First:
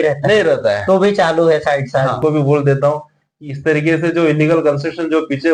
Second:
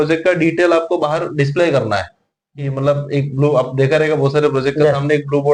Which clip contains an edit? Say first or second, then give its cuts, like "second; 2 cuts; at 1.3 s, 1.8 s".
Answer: first; 1 cut; at 2.2 s